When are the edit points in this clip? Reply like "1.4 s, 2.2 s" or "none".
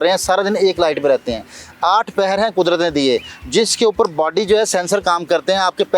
none